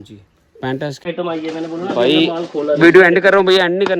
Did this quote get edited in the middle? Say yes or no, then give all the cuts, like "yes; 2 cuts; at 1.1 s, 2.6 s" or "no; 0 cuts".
yes; 1 cut; at 1.0 s